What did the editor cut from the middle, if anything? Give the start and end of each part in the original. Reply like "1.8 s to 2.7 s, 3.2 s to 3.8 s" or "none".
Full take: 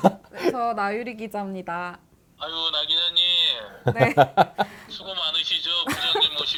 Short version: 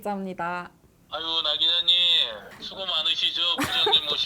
3.8 s to 4.8 s